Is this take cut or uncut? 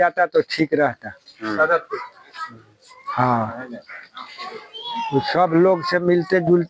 uncut